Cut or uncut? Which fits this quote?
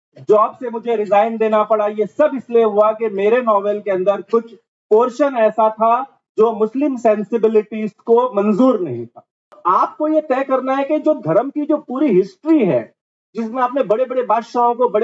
cut